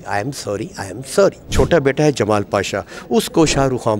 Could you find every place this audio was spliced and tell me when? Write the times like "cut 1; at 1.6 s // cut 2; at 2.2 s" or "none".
cut 1; at 1.5 s